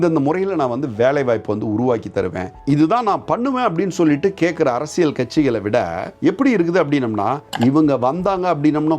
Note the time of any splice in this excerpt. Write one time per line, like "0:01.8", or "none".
none